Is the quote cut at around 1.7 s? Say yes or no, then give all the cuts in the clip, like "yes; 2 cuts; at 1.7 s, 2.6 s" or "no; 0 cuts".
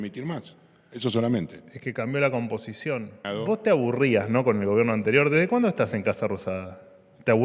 no; 1 cut; at 3.2 s